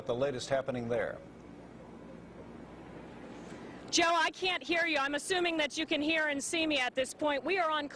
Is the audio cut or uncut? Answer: cut